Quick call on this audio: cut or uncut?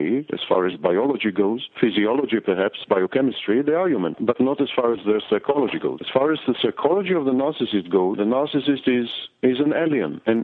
uncut